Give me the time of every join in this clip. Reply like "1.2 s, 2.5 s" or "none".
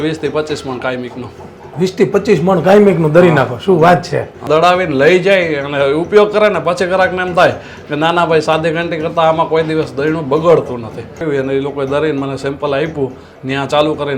4.4 s, 11.2 s